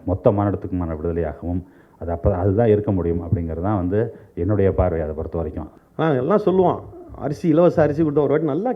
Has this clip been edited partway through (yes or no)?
yes